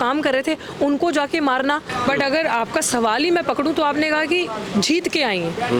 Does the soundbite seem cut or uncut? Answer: cut